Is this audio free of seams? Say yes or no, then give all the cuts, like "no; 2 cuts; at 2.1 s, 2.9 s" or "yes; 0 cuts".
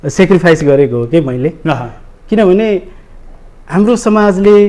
yes; 0 cuts